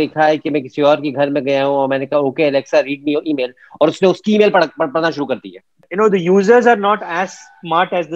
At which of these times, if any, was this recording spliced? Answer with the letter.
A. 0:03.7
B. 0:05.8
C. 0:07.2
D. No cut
B